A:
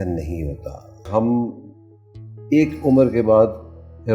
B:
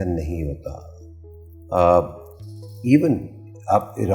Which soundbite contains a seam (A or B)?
A